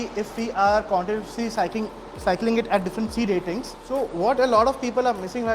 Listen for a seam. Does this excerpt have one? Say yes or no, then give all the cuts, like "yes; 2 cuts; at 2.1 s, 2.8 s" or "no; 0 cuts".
yes; 1 cut; at 3.8 s